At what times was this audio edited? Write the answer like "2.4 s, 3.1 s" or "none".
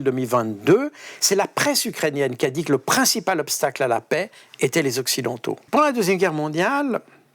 1.1 s, 5.7 s